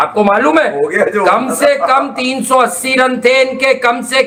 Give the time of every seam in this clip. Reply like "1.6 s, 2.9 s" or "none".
none

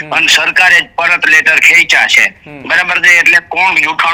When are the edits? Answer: none

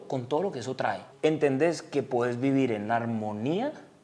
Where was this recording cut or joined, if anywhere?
1.1 s

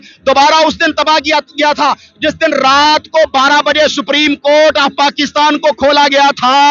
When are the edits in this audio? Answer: none

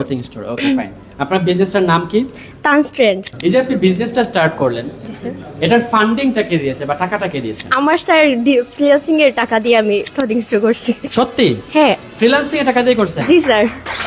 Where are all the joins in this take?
none

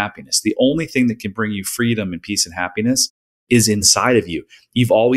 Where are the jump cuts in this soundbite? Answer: 3.9 s

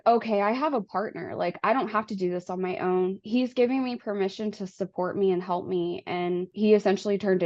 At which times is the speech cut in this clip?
none

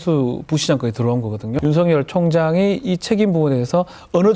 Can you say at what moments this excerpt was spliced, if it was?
1.6 s

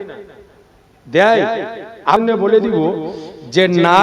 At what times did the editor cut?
2.2 s

